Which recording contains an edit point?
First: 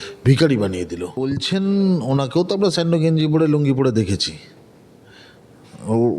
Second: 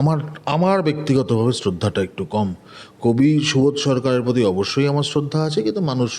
first; 1 cut; at 1.1 s

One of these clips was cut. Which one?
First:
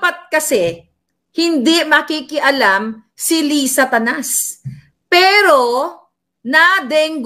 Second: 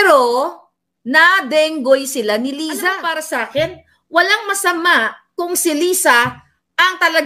second; 1 cut; at 3.0 s

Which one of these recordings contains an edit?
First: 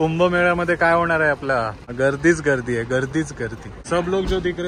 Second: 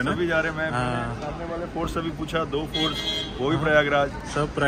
first; 2 cuts; at 1.8 s, 3.7 s

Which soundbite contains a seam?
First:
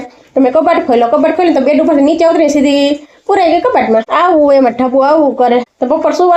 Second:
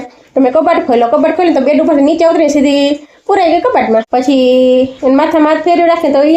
second; 1 cut; at 4.1 s

